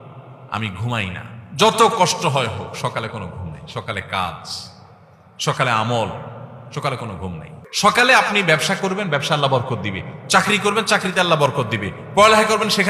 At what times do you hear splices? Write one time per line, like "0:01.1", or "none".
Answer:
0:07.6